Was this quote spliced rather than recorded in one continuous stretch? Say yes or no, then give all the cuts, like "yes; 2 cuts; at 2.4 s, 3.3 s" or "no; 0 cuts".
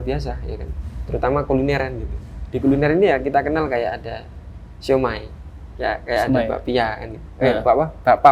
no; 0 cuts